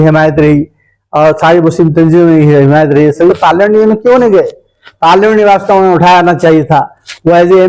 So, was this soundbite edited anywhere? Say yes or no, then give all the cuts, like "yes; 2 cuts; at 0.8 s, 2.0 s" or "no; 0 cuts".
yes; 1 cut; at 3.4 s